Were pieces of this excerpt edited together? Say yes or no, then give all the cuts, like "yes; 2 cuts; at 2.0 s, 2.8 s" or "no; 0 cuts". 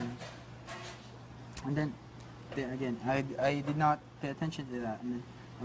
yes; 1 cut; at 3.3 s